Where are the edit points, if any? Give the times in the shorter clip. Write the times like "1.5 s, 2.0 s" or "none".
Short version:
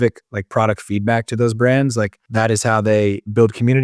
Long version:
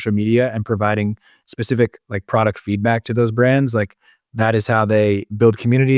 2.2 s